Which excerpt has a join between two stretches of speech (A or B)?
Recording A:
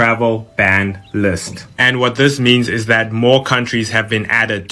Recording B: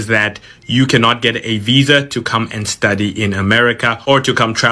A